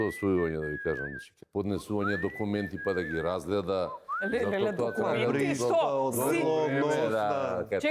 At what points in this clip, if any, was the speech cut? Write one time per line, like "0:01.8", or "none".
0:01.3